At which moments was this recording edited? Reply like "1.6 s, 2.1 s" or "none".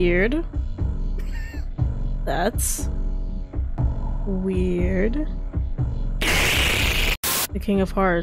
7.2 s